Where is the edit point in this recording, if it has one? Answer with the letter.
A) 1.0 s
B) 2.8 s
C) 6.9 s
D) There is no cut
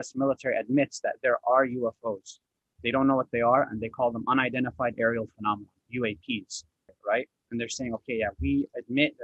C